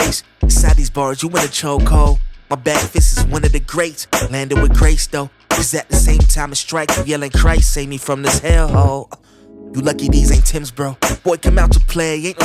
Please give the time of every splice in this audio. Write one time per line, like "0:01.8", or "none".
none